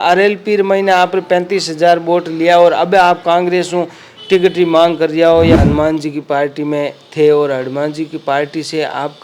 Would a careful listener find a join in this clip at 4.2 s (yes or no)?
no